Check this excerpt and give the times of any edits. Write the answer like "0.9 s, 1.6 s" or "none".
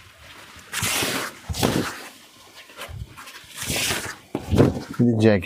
none